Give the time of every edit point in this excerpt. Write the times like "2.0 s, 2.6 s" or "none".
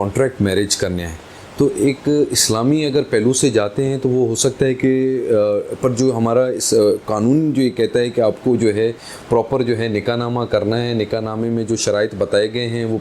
none